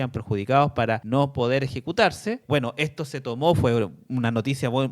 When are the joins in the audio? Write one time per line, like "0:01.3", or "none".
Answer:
0:01.0
0:02.4